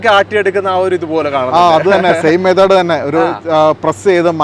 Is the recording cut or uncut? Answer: uncut